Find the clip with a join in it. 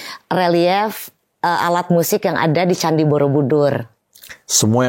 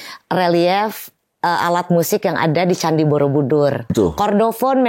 second; 1 cut; at 3.9 s

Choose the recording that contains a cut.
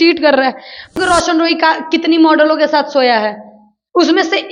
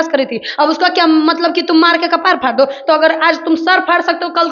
first; 1 cut; at 0.9 s

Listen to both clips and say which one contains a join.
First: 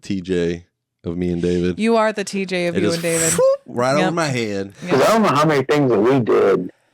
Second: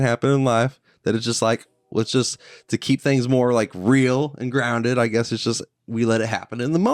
first; 1 cut; at 4.7 s

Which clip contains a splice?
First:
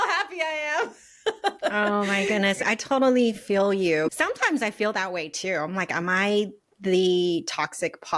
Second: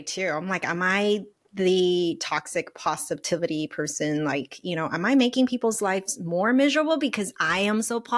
first; 2 cuts; at 2.6 s, 4.1 s

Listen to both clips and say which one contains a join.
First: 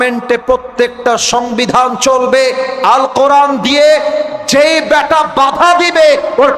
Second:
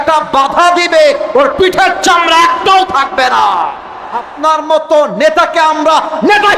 second; 1 cut; at 4.3 s

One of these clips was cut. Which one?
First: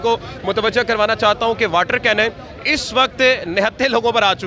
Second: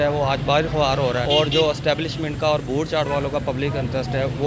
second; 1 cut; at 1.2 s

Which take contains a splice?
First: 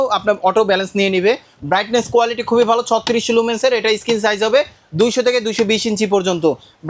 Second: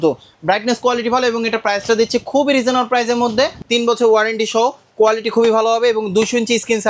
second; 1 cut; at 3.6 s

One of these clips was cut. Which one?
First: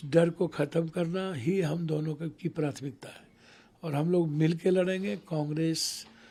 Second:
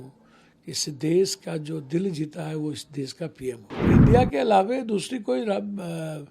second; 1 cut; at 3.9 s

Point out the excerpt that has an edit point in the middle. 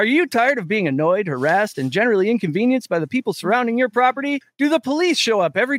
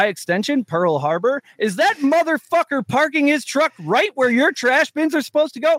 first; 1 cut; at 4.4 s

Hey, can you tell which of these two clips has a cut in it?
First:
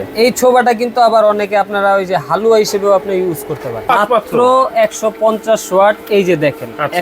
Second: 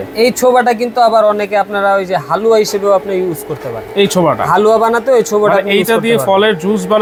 first; 1 cut; at 3.9 s

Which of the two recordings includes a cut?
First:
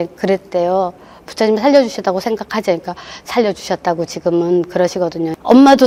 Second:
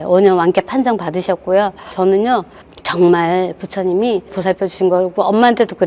second; 1 cut; at 1.8 s

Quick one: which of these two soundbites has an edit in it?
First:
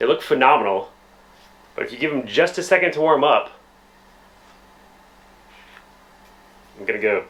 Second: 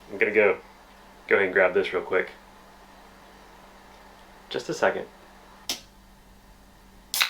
second; 1 cut; at 5.6 s

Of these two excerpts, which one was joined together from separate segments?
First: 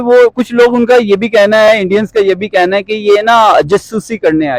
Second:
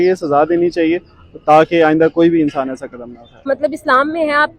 second; 1 cut; at 3.4 s

